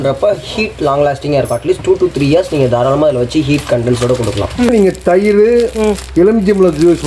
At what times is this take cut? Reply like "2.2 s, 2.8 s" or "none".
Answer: 4.7 s